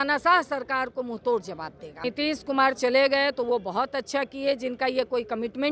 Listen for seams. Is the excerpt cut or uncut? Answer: cut